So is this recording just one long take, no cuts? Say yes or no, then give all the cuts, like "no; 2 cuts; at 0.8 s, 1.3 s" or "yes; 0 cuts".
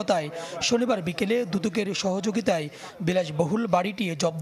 yes; 0 cuts